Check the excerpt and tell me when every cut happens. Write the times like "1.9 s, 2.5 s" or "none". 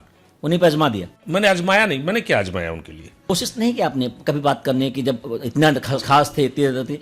1.1 s, 3.3 s